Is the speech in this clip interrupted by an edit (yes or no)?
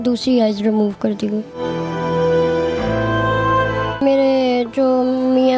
yes